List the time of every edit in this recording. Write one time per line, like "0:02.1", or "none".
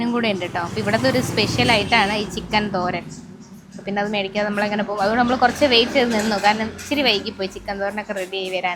none